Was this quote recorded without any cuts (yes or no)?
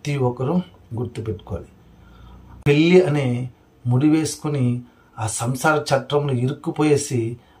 no